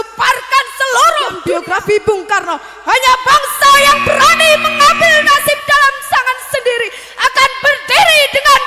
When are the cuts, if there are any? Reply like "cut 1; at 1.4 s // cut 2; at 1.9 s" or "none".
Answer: cut 1; at 1.5 s